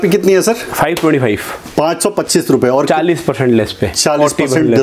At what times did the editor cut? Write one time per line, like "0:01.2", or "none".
none